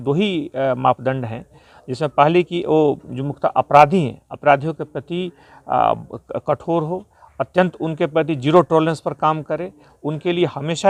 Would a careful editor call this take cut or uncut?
uncut